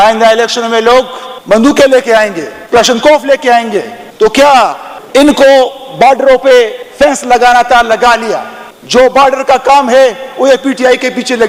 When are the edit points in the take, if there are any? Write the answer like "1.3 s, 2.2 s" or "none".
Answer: none